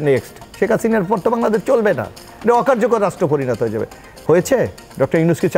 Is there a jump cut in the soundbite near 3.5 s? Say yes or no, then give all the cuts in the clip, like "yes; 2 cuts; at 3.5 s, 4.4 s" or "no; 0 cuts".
no; 0 cuts